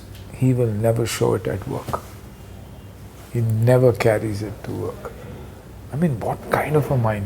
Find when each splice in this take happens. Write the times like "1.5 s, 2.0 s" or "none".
none